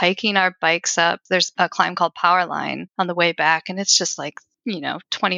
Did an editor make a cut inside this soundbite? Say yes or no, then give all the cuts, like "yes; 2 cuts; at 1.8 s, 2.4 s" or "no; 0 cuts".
yes; 3 cuts; at 1.3 s, 2.8 s, 4.5 s